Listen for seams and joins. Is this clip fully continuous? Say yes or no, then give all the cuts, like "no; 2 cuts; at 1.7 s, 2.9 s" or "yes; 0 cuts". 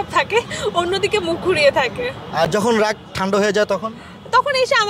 yes; 0 cuts